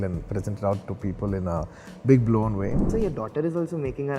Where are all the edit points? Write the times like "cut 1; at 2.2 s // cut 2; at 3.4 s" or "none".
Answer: cut 1; at 2.9 s